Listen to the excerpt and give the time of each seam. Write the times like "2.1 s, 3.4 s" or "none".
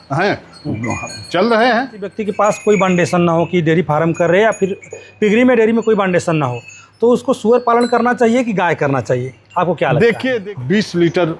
2.2 s, 10.4 s